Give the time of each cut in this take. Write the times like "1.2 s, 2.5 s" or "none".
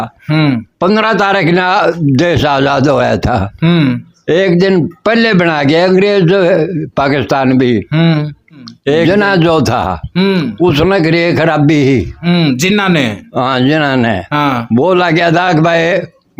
9.1 s